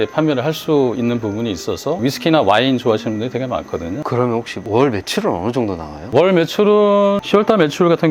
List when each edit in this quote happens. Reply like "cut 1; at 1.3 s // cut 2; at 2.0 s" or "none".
cut 1; at 2.0 s // cut 2; at 4.0 s // cut 3; at 7.2 s